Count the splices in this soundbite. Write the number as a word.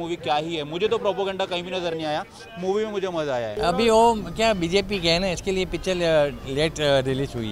one